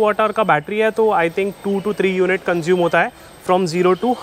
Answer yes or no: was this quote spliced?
no